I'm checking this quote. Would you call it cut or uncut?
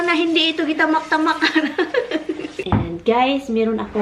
cut